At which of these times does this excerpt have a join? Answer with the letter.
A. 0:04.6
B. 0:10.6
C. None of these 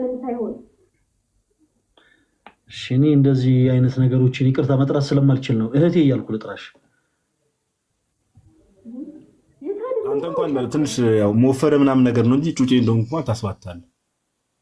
B